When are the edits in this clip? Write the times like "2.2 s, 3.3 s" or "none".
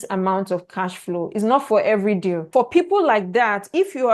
2.5 s